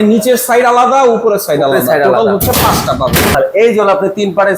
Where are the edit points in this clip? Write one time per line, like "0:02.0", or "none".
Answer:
0:03.3